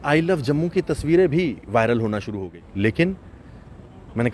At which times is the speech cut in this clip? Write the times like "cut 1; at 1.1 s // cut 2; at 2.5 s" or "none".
cut 1; at 2.3 s